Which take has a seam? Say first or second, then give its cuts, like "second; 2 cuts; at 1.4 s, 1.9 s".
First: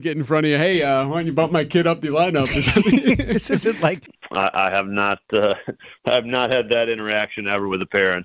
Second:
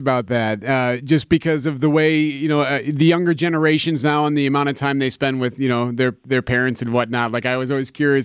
first; 1 cut; at 4.1 s